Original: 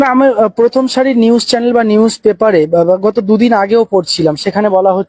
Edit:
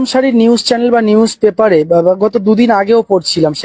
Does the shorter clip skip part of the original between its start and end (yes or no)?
no